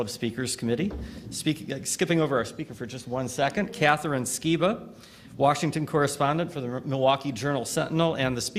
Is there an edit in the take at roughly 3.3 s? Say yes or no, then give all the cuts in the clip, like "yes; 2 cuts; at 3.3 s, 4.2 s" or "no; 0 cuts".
no; 1 cut; at 6.1 s